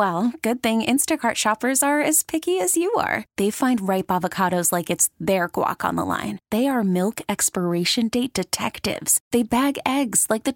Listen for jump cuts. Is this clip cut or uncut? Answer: uncut